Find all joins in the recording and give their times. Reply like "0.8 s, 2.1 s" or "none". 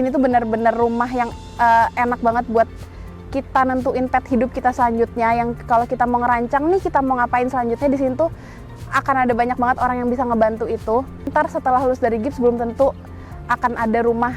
11.3 s